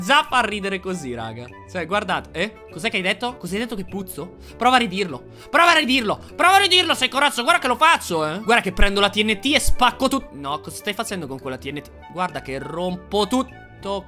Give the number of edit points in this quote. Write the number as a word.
zero